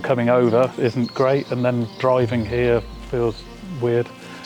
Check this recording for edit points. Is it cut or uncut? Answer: uncut